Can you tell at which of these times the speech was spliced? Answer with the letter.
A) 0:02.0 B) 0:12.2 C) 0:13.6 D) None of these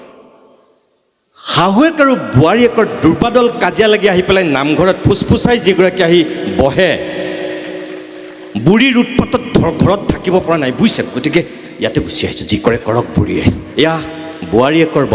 D